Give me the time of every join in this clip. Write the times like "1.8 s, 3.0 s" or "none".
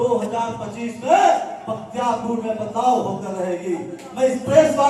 none